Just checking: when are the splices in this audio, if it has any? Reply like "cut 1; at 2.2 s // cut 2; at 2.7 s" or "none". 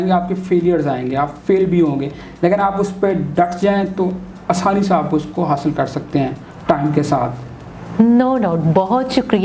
none